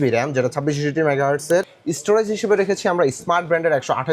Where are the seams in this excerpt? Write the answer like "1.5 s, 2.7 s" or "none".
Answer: 1.8 s

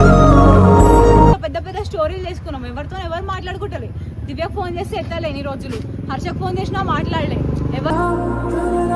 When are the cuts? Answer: 1.3 s

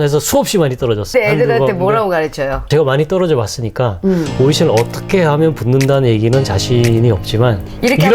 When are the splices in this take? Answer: 1.1 s, 2.7 s

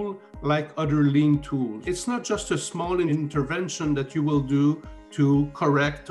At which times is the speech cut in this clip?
1.8 s, 3.1 s

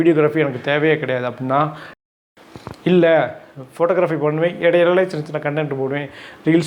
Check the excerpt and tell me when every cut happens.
2.0 s

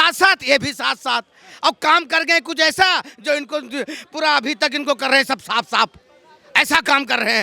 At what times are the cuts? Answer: none

